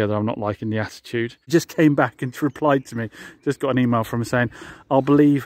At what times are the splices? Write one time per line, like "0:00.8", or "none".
0:01.5